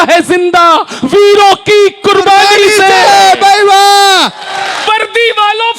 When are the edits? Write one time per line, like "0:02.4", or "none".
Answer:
0:04.8